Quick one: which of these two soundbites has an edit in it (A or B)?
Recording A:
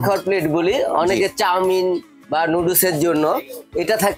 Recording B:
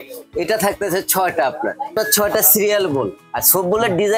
B